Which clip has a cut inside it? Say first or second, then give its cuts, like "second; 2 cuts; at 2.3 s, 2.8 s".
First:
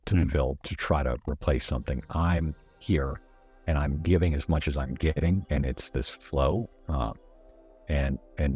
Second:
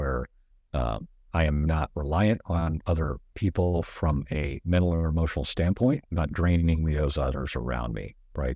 second; 2 cuts; at 4.6 s, 6.1 s